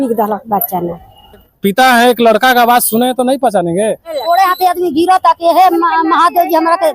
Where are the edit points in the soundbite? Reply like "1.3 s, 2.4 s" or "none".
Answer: 1.5 s, 4.2 s